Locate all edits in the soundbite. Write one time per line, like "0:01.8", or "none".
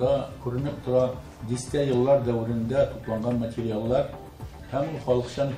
0:01.3